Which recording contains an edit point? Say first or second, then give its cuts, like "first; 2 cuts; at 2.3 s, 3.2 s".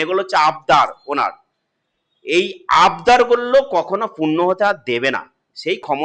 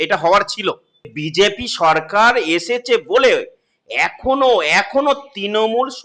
second; 1 cut; at 1.2 s